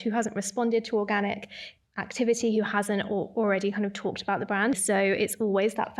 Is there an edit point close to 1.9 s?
no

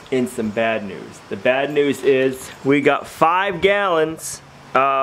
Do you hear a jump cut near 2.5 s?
yes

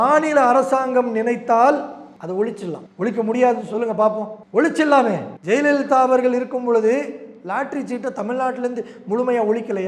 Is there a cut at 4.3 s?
yes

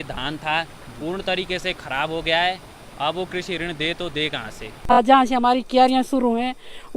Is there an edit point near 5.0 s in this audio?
yes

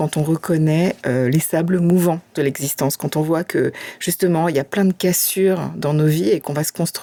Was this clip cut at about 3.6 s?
no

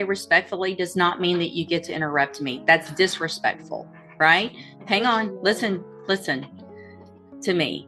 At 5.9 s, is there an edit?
no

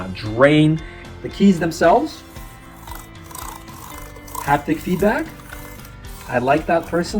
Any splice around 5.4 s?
no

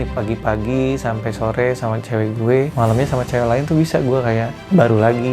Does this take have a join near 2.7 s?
yes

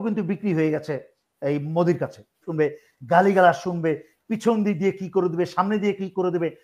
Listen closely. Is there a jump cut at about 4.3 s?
no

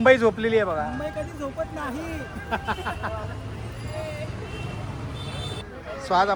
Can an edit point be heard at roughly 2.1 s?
no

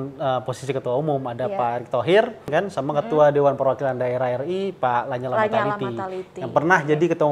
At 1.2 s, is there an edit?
no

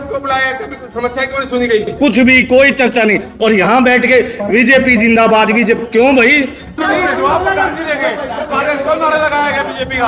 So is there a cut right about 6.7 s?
yes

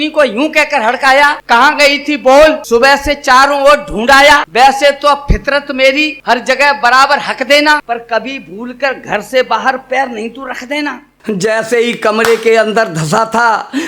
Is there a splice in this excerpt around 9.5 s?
no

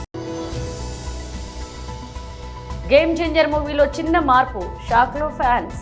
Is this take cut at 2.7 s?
no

